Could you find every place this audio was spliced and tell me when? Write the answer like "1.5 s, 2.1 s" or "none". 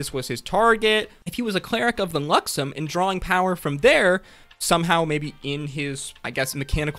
1.2 s